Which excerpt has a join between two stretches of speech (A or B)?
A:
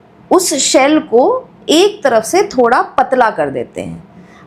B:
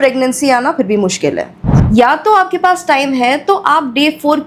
B